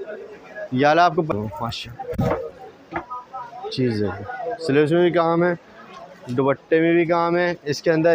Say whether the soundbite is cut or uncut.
cut